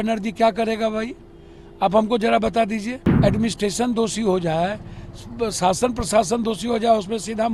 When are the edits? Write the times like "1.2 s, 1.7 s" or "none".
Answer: 3.0 s

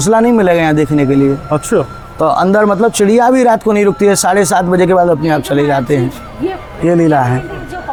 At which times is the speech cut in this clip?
none

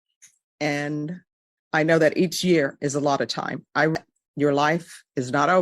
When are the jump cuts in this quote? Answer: 4.0 s

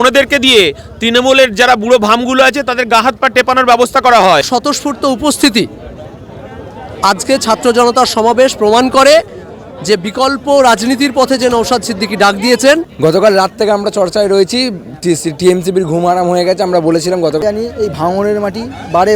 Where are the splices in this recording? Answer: 4.5 s, 12.9 s, 17.4 s

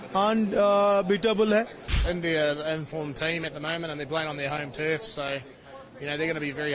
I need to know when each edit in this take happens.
2.0 s

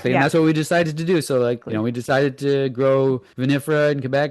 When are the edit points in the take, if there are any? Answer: 1.6 s, 3.3 s

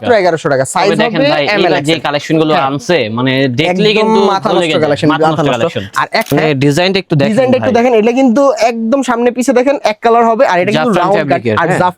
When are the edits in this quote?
6.3 s

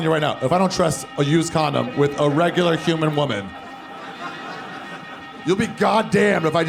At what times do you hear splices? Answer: 1.1 s

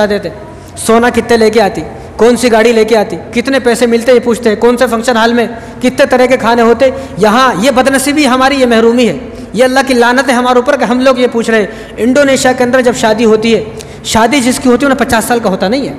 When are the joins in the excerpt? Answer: none

